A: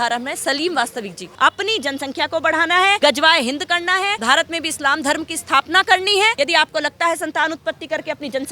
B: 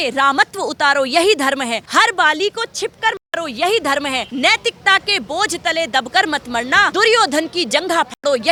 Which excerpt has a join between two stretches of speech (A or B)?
A